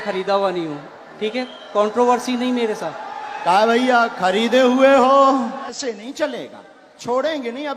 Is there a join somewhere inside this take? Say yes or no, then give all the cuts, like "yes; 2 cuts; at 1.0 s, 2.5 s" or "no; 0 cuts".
yes; 1 cut; at 5.7 s